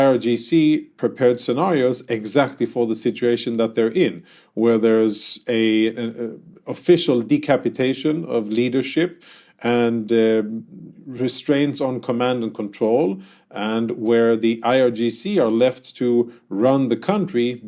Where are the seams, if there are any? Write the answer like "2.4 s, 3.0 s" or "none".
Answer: 0.9 s